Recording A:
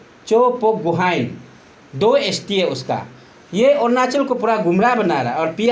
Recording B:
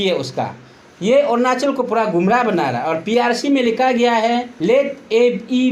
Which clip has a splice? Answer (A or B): B